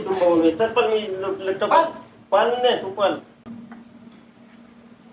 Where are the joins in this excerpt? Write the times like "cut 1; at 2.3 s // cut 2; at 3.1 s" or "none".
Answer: cut 1; at 3.4 s

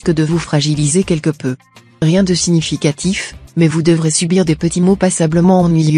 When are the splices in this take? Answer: cut 1; at 2.3 s

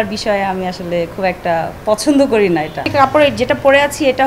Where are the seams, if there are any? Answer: cut 1; at 1.8 s // cut 2; at 2.9 s

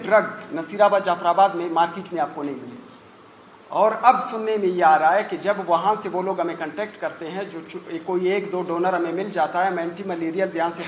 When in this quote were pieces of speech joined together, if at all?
none

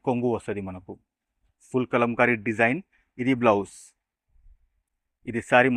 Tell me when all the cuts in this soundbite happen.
none

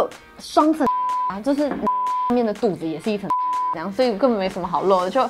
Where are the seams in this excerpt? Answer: none

